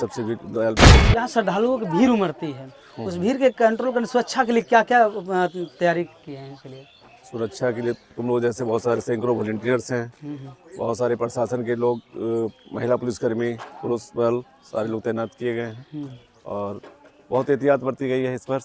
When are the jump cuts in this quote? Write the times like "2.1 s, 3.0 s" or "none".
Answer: 1.0 s